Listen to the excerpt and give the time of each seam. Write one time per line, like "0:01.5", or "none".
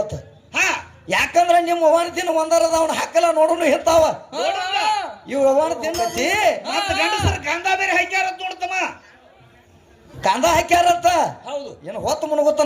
0:06.0